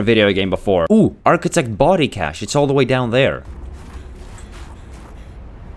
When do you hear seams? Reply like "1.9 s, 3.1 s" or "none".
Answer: 0.8 s, 3.6 s